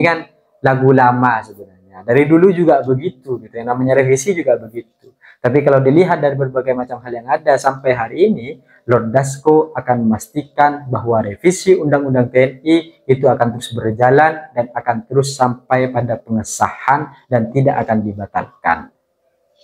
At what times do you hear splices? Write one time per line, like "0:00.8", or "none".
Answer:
none